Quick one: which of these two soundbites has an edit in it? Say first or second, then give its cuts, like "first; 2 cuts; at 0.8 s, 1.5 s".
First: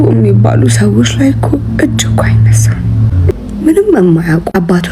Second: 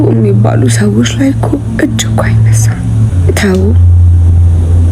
first; 1 cut; at 3.4 s